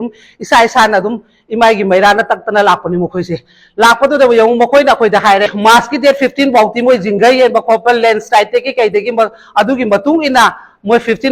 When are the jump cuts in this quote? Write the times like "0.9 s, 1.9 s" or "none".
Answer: 5.5 s